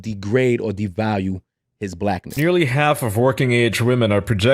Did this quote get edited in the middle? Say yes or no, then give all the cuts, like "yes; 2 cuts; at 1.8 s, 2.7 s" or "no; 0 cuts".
yes; 1 cut; at 2.3 s